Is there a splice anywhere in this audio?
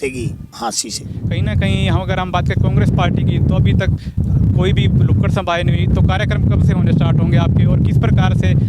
yes; 1 cut; at 1.2 s

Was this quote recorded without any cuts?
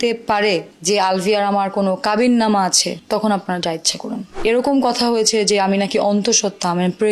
yes; 0 cuts

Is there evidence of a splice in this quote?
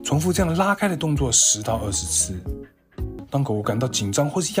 yes; 1 cut; at 3.2 s

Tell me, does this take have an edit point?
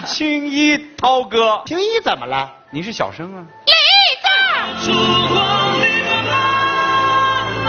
yes; 2 cuts; at 1.7 s, 4.7 s

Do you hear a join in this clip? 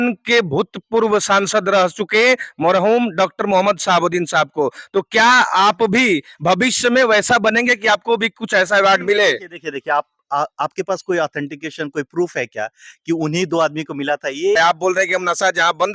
yes; 1 cut; at 14.6 s

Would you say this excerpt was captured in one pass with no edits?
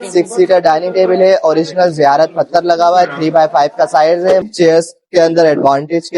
no; 1 cut; at 4.4 s

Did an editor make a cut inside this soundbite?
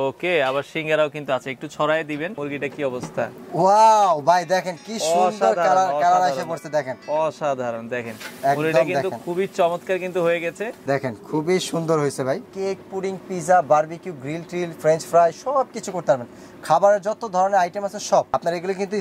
yes; 4 cuts; at 2.4 s, 10.7 s, 12.5 s, 18.3 s

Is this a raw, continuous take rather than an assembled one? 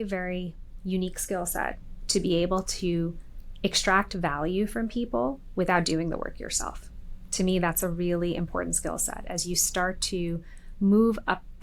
yes; 0 cuts

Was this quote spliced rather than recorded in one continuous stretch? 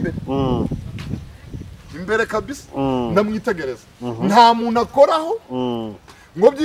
no; 0 cuts

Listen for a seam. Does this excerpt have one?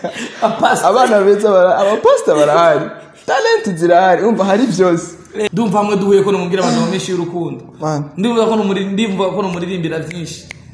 yes; 1 cut; at 5.4 s

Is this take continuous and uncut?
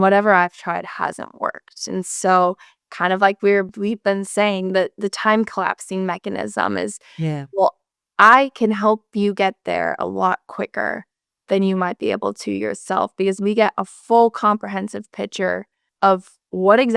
no; 2 cuts; at 3.7 s, 15.8 s

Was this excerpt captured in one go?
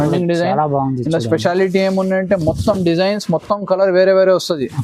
yes; 0 cuts

